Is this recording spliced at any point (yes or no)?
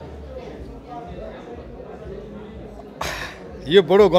no